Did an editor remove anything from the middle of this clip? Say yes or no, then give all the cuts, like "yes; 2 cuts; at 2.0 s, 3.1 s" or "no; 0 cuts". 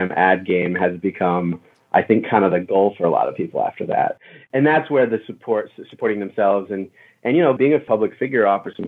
yes; 1 cut; at 4.1 s